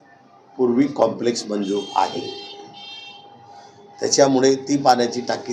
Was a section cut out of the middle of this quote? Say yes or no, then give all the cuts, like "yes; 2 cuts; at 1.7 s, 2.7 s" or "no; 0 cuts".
no; 0 cuts